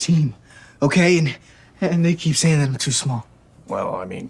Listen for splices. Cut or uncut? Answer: uncut